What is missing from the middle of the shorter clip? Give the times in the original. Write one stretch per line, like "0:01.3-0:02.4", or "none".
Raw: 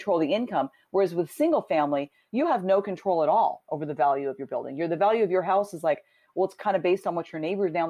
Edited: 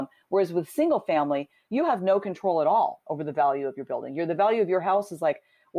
none